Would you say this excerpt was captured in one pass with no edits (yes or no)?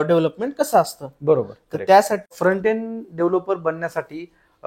no